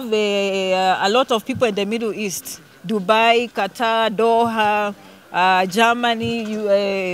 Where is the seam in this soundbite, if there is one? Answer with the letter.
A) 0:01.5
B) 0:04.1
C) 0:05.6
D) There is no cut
D